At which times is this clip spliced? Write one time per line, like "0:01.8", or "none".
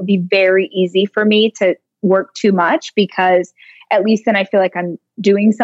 none